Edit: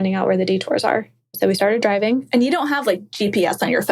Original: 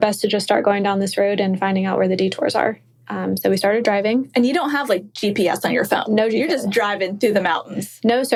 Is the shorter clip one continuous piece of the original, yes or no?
no